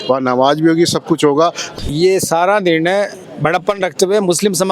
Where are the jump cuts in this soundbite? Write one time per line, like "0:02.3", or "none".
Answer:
0:01.6
0:03.2